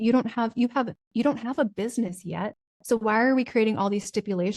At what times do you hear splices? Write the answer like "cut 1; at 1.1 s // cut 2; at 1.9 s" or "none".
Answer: cut 1; at 2.7 s